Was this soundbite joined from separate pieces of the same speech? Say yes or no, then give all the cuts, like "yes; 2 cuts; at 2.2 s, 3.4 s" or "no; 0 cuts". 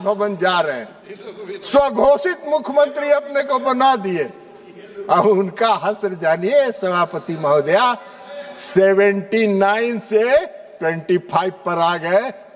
no; 0 cuts